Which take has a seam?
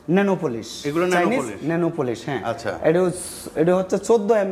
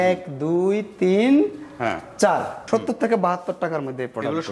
second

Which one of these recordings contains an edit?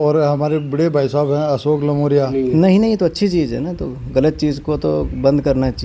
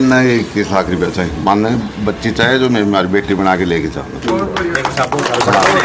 first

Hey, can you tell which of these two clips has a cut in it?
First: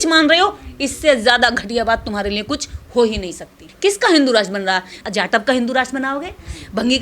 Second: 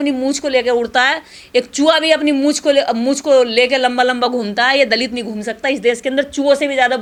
first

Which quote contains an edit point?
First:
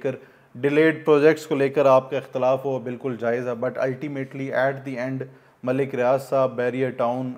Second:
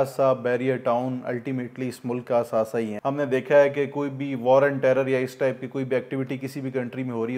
second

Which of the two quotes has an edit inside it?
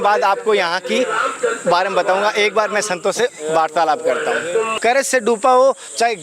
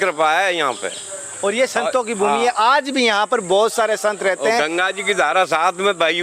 first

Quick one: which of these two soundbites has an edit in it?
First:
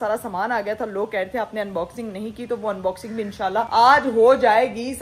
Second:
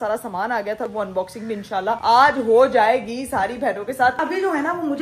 second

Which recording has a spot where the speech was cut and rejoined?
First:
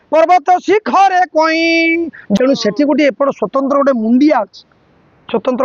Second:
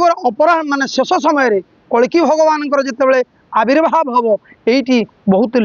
first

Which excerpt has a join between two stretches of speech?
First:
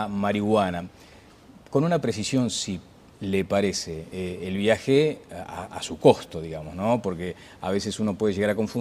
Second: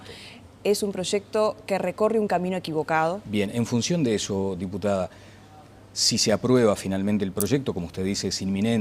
first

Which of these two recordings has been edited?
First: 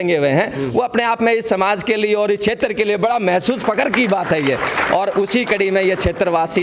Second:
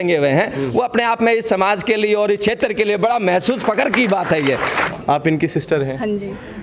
second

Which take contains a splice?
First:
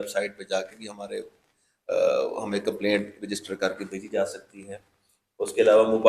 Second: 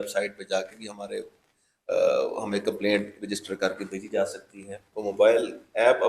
second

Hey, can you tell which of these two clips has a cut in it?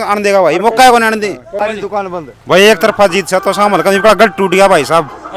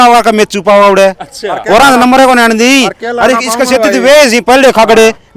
first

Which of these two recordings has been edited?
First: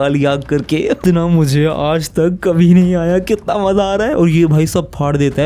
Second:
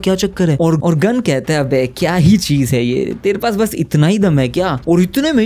first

